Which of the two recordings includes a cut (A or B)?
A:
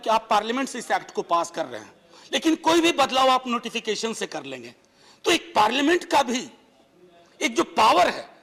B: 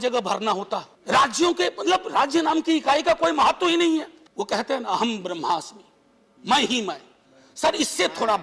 B